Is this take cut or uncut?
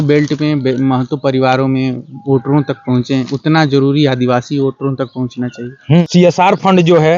cut